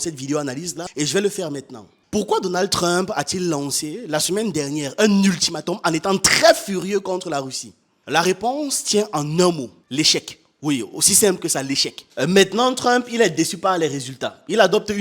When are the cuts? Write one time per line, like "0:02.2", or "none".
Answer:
0:12.0